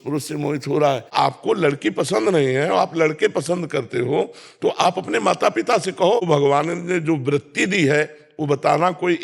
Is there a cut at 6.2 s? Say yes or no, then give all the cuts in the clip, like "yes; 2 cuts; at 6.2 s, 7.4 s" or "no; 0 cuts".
yes; 2 cuts; at 1.1 s, 6.2 s